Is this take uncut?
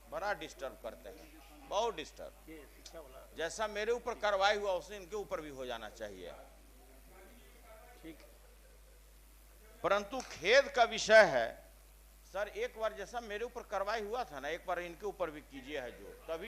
yes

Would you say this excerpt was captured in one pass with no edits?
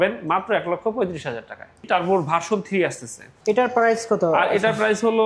no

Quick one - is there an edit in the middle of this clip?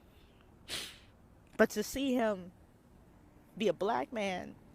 no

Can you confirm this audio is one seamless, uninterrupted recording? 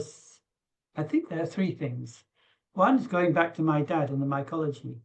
yes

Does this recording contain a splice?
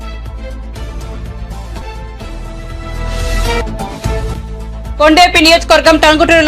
yes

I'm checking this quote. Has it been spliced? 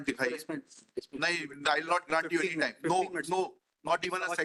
no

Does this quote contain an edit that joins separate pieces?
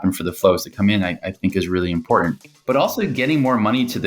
yes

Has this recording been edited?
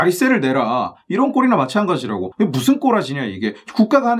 yes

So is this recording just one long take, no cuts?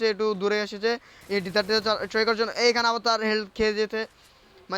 yes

